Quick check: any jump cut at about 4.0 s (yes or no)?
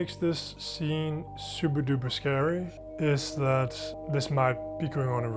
yes